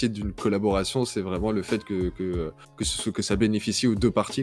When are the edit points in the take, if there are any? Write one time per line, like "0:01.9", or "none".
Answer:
none

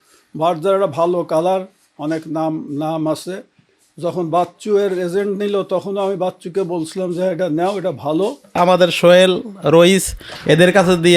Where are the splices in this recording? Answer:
0:08.6

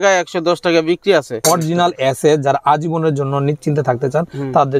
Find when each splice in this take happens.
0:01.4

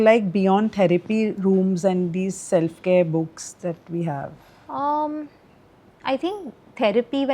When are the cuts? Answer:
none

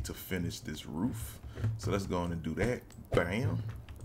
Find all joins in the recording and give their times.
none

